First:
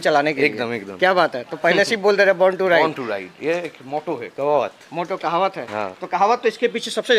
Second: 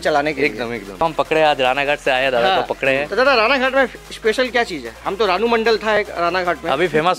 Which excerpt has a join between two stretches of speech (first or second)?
second